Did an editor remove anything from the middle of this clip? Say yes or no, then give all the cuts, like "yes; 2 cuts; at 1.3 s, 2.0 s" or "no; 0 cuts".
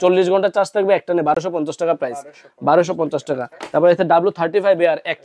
no; 0 cuts